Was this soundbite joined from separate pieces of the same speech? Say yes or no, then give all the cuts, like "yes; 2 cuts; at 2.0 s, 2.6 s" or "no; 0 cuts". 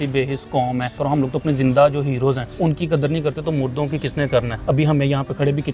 yes; 3 cuts; at 1.0 s, 2.5 s, 4.5 s